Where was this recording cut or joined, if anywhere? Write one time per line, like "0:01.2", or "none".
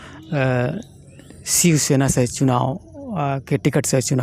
none